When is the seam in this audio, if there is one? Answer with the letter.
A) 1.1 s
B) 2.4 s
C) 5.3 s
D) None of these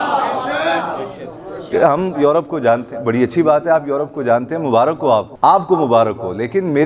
C